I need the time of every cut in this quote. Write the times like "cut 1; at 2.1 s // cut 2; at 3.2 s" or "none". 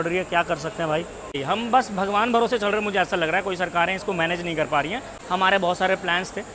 cut 1; at 1.4 s // cut 2; at 5.1 s